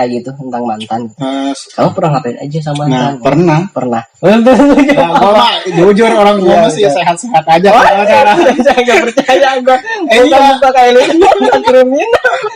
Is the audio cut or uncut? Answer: uncut